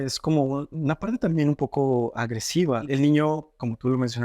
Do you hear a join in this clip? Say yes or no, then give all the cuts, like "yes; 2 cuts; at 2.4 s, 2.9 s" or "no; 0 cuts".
yes; 1 cut; at 2.9 s